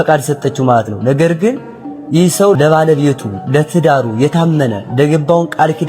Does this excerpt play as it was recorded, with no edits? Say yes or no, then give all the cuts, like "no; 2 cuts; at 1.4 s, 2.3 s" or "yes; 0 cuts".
no; 1 cut; at 2.6 s